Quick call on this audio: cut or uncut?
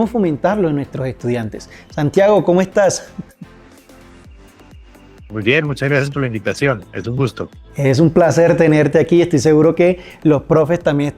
cut